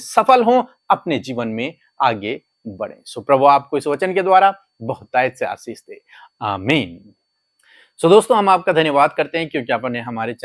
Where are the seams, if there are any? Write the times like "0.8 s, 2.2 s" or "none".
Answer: none